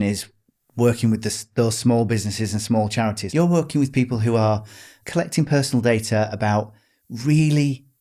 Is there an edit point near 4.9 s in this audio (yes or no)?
yes